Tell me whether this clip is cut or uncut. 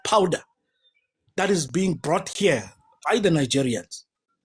uncut